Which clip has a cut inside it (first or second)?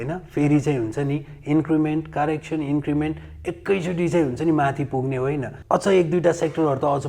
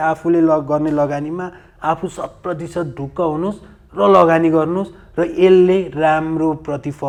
first